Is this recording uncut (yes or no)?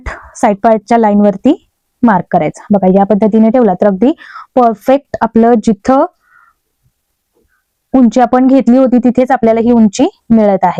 yes